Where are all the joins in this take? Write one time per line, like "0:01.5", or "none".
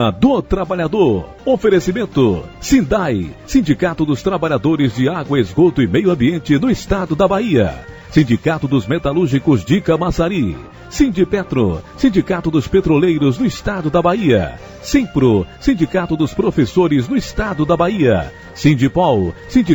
0:01.3
0:02.5